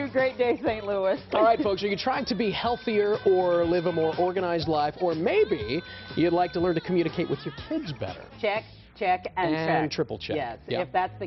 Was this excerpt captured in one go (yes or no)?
yes